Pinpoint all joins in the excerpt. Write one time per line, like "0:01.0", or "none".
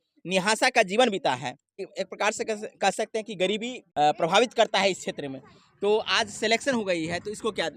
0:01.8
0:03.8